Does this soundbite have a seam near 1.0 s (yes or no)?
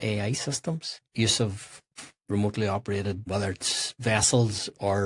yes